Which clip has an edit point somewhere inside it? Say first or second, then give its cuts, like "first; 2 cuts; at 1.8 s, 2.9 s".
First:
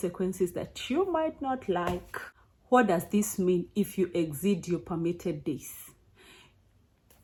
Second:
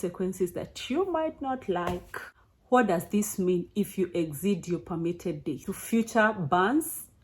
second; 1 cut; at 5.7 s